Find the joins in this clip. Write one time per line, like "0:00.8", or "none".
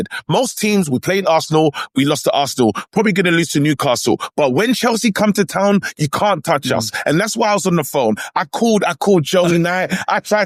none